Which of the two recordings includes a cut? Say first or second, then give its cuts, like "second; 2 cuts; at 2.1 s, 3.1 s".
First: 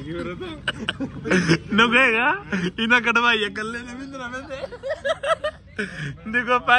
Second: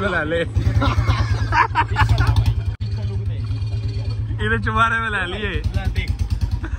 second; 1 cut; at 2.7 s